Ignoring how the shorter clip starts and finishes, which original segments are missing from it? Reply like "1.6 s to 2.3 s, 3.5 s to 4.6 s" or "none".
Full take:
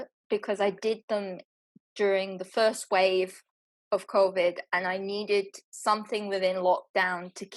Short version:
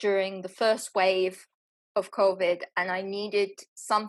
none